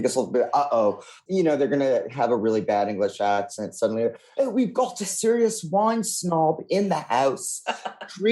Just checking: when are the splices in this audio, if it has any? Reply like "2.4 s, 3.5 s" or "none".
1.1 s